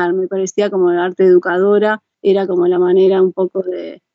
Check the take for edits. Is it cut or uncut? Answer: cut